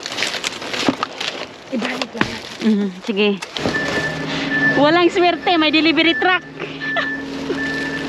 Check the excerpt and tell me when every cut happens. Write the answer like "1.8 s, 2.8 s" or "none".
3.5 s